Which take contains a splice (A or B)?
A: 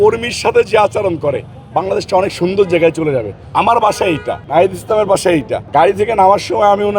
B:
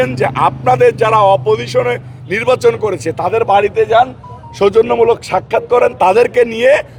A